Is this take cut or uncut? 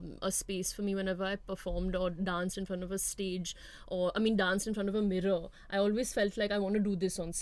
uncut